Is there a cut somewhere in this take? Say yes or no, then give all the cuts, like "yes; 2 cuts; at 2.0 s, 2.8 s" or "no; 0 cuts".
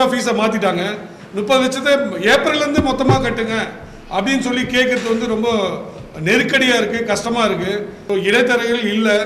yes; 1 cut; at 8.0 s